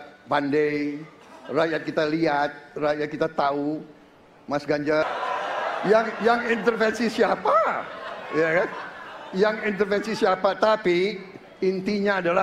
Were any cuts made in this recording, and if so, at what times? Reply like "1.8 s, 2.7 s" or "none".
5.0 s